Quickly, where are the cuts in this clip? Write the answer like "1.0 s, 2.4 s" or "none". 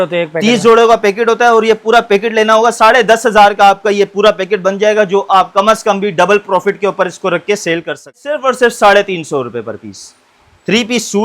8.3 s